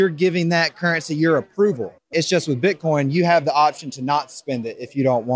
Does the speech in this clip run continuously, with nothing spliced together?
no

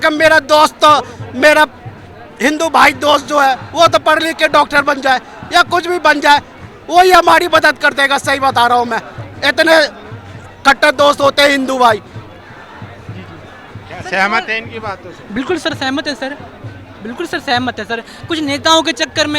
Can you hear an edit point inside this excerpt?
no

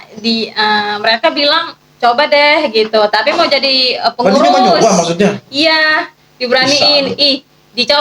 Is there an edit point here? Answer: no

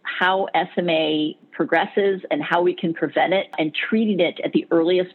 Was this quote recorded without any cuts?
no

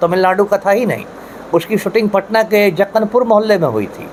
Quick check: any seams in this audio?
no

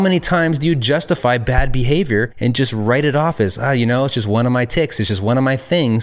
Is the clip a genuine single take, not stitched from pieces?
no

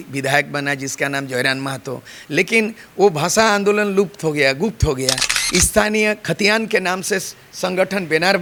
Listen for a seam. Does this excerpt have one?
no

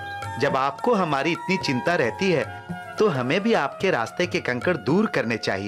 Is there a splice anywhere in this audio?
no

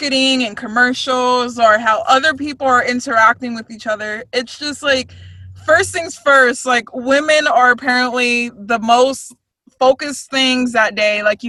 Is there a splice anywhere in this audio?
no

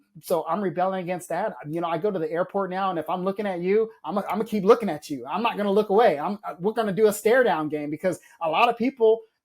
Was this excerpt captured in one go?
yes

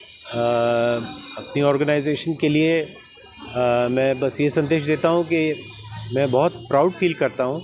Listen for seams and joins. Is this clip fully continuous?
yes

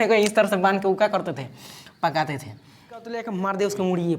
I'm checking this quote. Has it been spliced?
yes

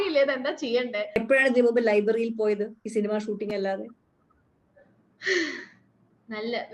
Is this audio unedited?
no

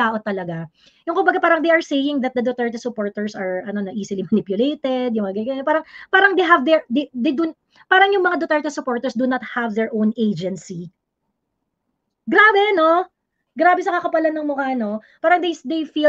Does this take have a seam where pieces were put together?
no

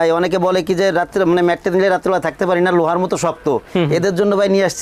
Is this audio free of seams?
yes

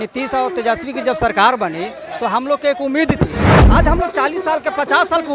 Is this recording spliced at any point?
yes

